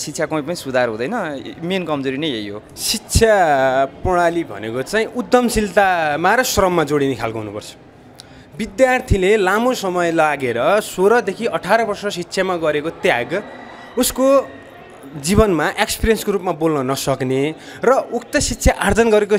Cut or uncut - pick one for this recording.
cut